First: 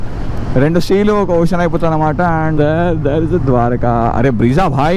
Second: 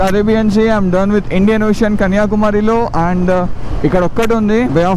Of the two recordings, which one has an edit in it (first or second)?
first